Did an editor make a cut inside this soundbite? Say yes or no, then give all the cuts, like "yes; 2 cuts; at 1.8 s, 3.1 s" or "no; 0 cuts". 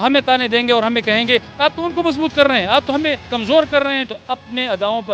yes; 2 cuts; at 1.5 s, 4.1 s